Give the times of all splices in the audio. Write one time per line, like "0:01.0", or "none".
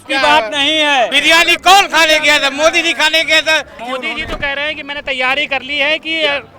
0:01.2
0:03.8